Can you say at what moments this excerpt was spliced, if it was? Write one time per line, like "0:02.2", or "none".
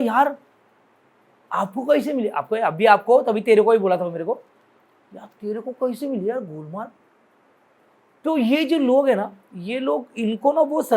none